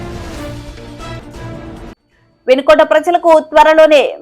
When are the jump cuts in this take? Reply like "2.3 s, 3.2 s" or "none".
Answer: 1.1 s